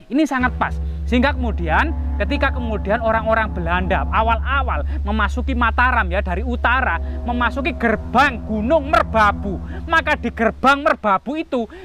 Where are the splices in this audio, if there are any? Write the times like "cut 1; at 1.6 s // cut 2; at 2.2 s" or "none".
none